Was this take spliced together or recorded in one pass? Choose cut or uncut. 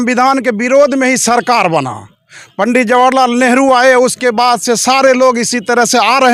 uncut